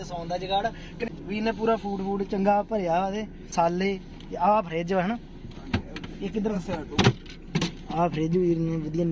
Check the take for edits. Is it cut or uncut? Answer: cut